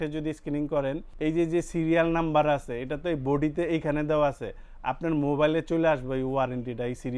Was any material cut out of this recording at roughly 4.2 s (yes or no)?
no